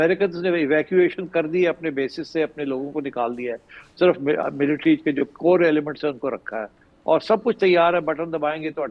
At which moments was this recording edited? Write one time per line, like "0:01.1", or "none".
none